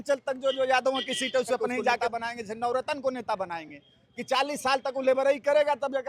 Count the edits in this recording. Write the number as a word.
one